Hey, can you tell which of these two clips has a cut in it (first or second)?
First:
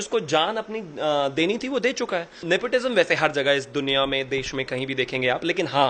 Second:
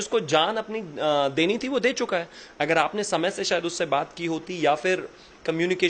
first